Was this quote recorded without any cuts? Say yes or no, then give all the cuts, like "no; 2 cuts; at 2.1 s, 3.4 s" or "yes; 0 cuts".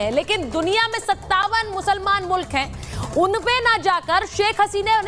yes; 0 cuts